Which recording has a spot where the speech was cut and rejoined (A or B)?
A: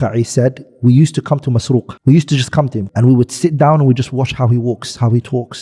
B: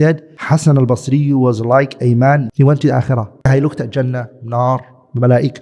B